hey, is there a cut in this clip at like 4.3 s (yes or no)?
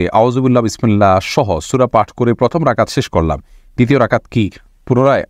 no